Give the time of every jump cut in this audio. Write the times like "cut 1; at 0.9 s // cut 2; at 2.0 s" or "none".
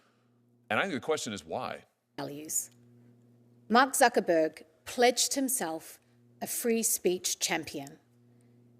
cut 1; at 2.2 s